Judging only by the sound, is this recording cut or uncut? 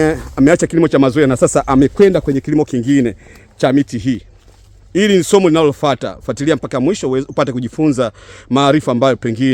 uncut